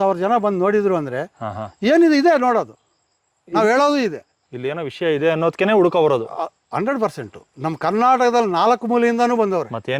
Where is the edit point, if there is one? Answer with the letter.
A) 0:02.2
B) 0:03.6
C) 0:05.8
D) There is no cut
D